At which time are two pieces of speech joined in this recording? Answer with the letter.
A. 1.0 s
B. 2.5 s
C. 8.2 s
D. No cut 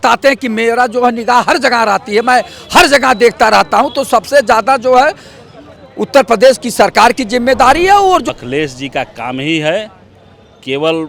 C